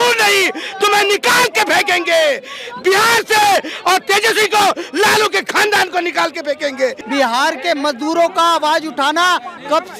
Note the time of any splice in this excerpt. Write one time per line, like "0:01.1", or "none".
0:07.0